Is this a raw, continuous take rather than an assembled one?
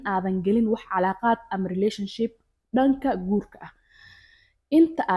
yes; 0 cuts

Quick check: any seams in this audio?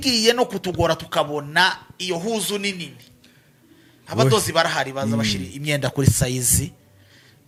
no; 0 cuts

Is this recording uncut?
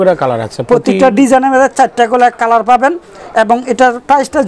yes; 0 cuts

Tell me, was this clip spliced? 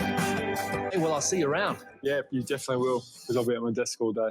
yes; 1 cut; at 0.9 s

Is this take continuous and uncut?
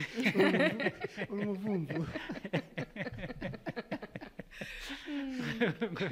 yes; 0 cuts

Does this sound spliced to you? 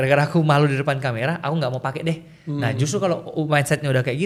no; 0 cuts

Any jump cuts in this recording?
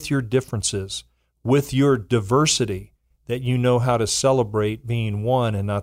no; 0 cuts

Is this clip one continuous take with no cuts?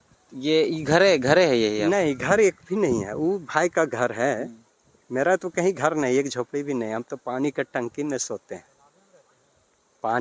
yes; 0 cuts

